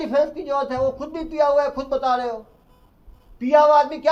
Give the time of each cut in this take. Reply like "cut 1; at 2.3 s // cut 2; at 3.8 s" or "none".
none